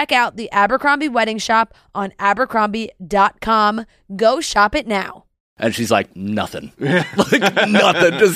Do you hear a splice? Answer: yes; 1 cut; at 5.5 s

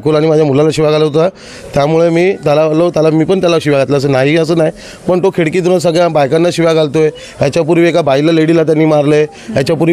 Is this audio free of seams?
yes; 0 cuts

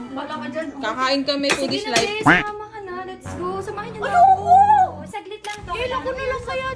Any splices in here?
yes; 1 cut; at 5.8 s

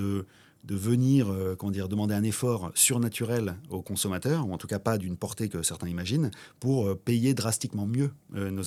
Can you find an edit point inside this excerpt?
no; 0 cuts

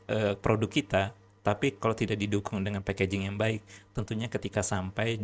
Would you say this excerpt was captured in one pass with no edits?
yes; 0 cuts

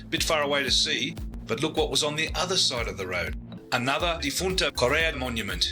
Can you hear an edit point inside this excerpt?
yes; 2 cuts; at 1.3 s, 3.5 s

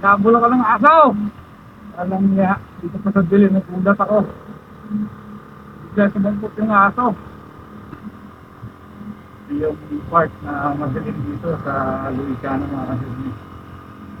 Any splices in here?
yes; 1 cut; at 7.9 s

